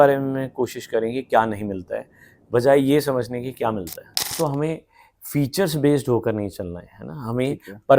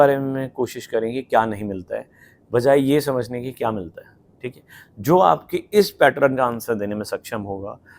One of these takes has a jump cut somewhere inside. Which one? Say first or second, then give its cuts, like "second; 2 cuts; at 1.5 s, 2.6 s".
first; 1 cut; at 4.3 s